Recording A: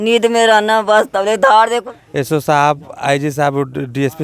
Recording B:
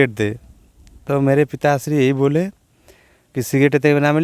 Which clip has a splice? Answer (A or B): A